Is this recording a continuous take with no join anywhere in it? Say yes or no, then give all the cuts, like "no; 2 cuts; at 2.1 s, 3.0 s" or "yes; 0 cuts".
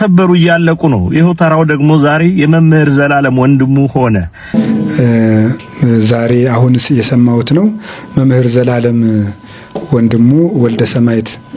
no; 1 cut; at 4.5 s